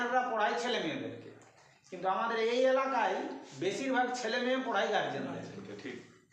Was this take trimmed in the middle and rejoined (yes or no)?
no